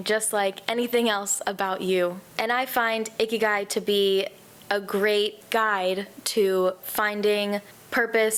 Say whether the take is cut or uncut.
uncut